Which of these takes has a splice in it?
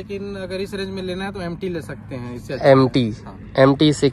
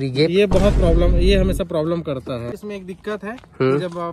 second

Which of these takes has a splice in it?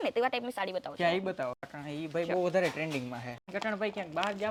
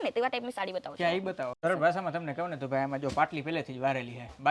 second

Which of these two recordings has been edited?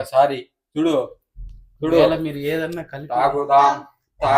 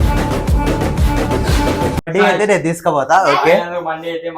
second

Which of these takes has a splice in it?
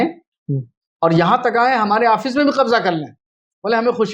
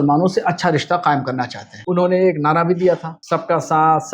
second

